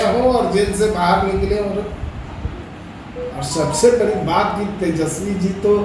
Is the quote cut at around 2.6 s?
yes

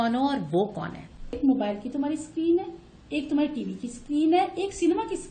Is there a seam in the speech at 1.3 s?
yes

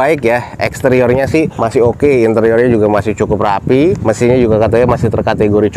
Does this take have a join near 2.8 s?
no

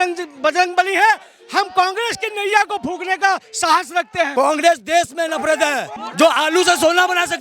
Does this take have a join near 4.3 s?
yes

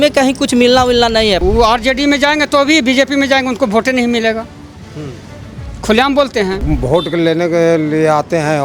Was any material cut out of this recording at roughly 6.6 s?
yes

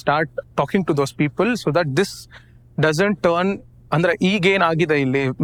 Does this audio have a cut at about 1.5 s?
no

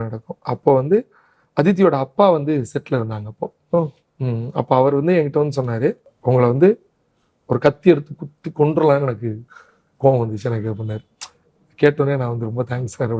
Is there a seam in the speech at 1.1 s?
no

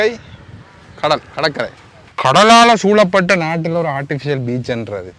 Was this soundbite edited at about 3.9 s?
no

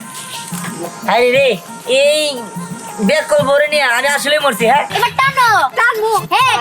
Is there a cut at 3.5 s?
no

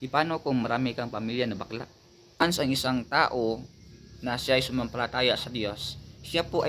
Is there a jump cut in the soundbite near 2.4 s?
yes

